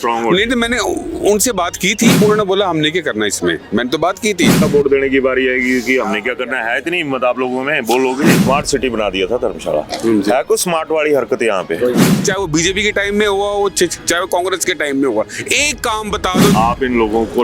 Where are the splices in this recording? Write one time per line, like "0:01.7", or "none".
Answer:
0:02.2
0:04.6
0:08.4
0:12.1
0:16.5